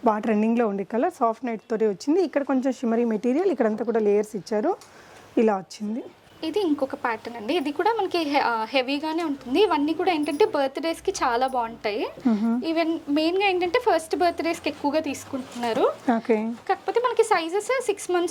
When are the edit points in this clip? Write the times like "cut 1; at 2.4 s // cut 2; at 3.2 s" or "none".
none